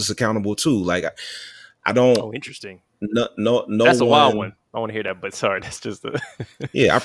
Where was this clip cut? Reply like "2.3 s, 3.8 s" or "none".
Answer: none